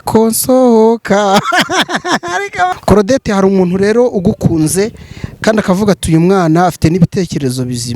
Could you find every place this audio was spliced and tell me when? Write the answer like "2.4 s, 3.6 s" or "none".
2.7 s